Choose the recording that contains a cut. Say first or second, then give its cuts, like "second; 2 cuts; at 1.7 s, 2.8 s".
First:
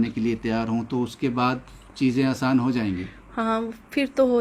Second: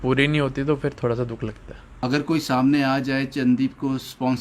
second; 1 cut; at 2.0 s